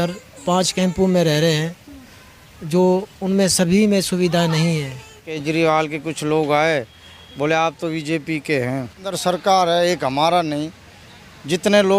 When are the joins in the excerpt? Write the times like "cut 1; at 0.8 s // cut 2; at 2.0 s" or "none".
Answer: cut 1; at 4.9 s // cut 2; at 9.2 s

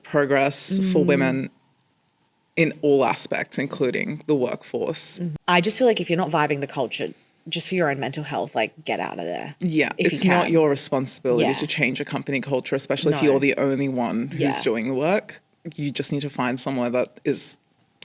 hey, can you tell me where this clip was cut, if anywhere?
cut 1; at 5.4 s

